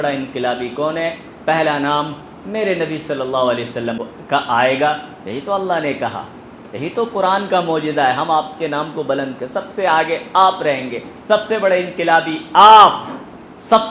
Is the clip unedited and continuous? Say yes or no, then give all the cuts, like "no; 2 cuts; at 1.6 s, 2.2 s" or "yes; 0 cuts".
no; 1 cut; at 4.0 s